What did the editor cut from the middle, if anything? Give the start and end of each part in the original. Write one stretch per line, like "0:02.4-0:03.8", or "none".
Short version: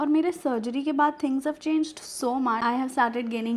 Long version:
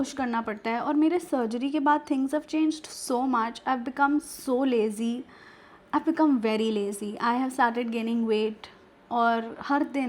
0:03.5-0:07.2